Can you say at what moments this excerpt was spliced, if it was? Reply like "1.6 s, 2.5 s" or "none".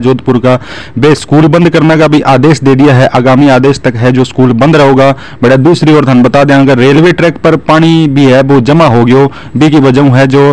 none